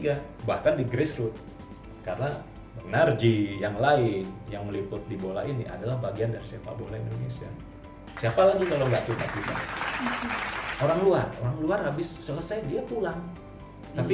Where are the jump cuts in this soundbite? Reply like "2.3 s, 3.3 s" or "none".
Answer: none